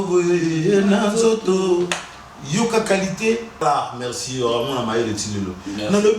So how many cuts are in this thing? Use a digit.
1